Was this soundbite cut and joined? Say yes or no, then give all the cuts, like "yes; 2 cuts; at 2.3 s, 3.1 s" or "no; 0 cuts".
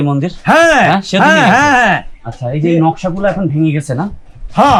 no; 0 cuts